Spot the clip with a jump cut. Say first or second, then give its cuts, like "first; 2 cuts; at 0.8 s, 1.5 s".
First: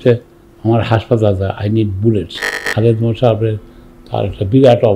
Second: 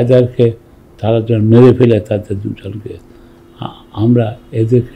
first; 1 cut; at 2.7 s